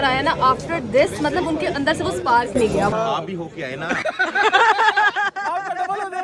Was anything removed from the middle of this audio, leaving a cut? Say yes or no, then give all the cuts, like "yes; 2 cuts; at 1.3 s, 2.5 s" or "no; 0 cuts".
yes; 1 cut; at 2.9 s